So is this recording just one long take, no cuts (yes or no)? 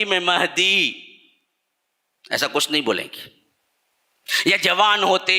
yes